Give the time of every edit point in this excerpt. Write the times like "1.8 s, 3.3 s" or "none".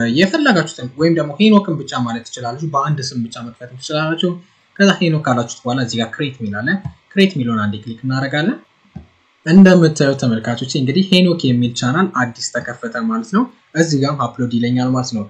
none